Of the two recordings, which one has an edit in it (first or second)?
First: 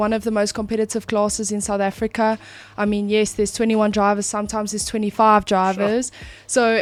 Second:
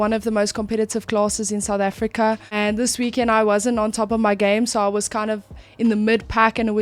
second